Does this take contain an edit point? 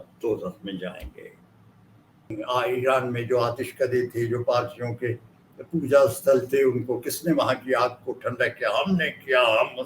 yes; 1 cut; at 2.3 s

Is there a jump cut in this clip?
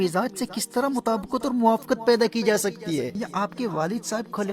yes; 1 cut; at 3.1 s

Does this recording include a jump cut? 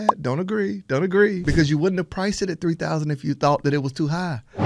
yes; 1 cut; at 1.4 s

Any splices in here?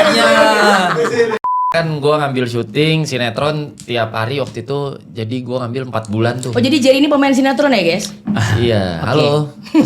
yes; 1 cut; at 1.7 s

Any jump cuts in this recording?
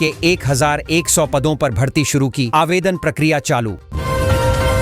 yes; 1 cut; at 3.9 s

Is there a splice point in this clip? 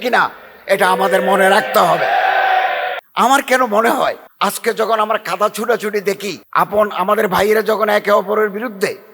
yes; 3 cuts; at 3.0 s, 4.3 s, 6.4 s

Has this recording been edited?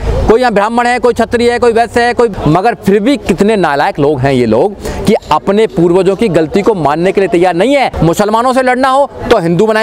yes; 2 cuts; at 2.4 s, 7.9 s

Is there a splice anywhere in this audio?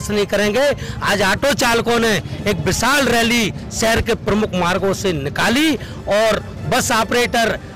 no; 0 cuts

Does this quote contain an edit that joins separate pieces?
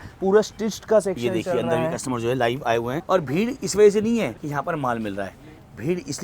yes; 2 cuts; at 3.0 s, 4.4 s

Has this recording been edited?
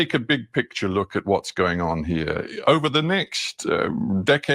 yes; 1 cut; at 2.5 s

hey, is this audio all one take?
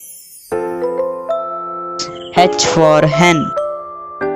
no; 2 cuts; at 2.2 s, 3.6 s

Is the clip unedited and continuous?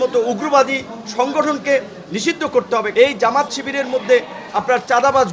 no; 1 cut; at 2.9 s

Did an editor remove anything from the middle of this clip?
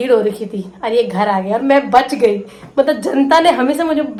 no; 0 cuts

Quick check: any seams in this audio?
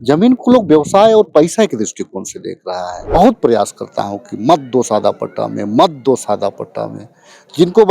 yes; 1 cut; at 3.0 s

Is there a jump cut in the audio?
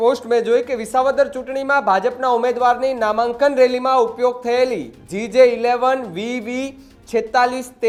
no; 0 cuts

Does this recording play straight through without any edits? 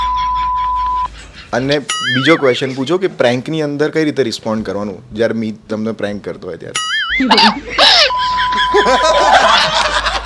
yes; 0 cuts

